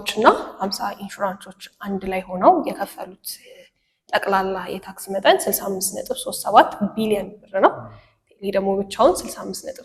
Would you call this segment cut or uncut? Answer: uncut